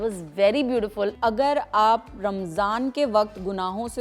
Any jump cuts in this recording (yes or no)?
yes